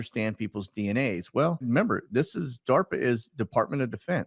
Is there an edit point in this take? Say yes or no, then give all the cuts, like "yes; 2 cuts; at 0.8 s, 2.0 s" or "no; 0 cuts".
yes; 1 cut; at 1.6 s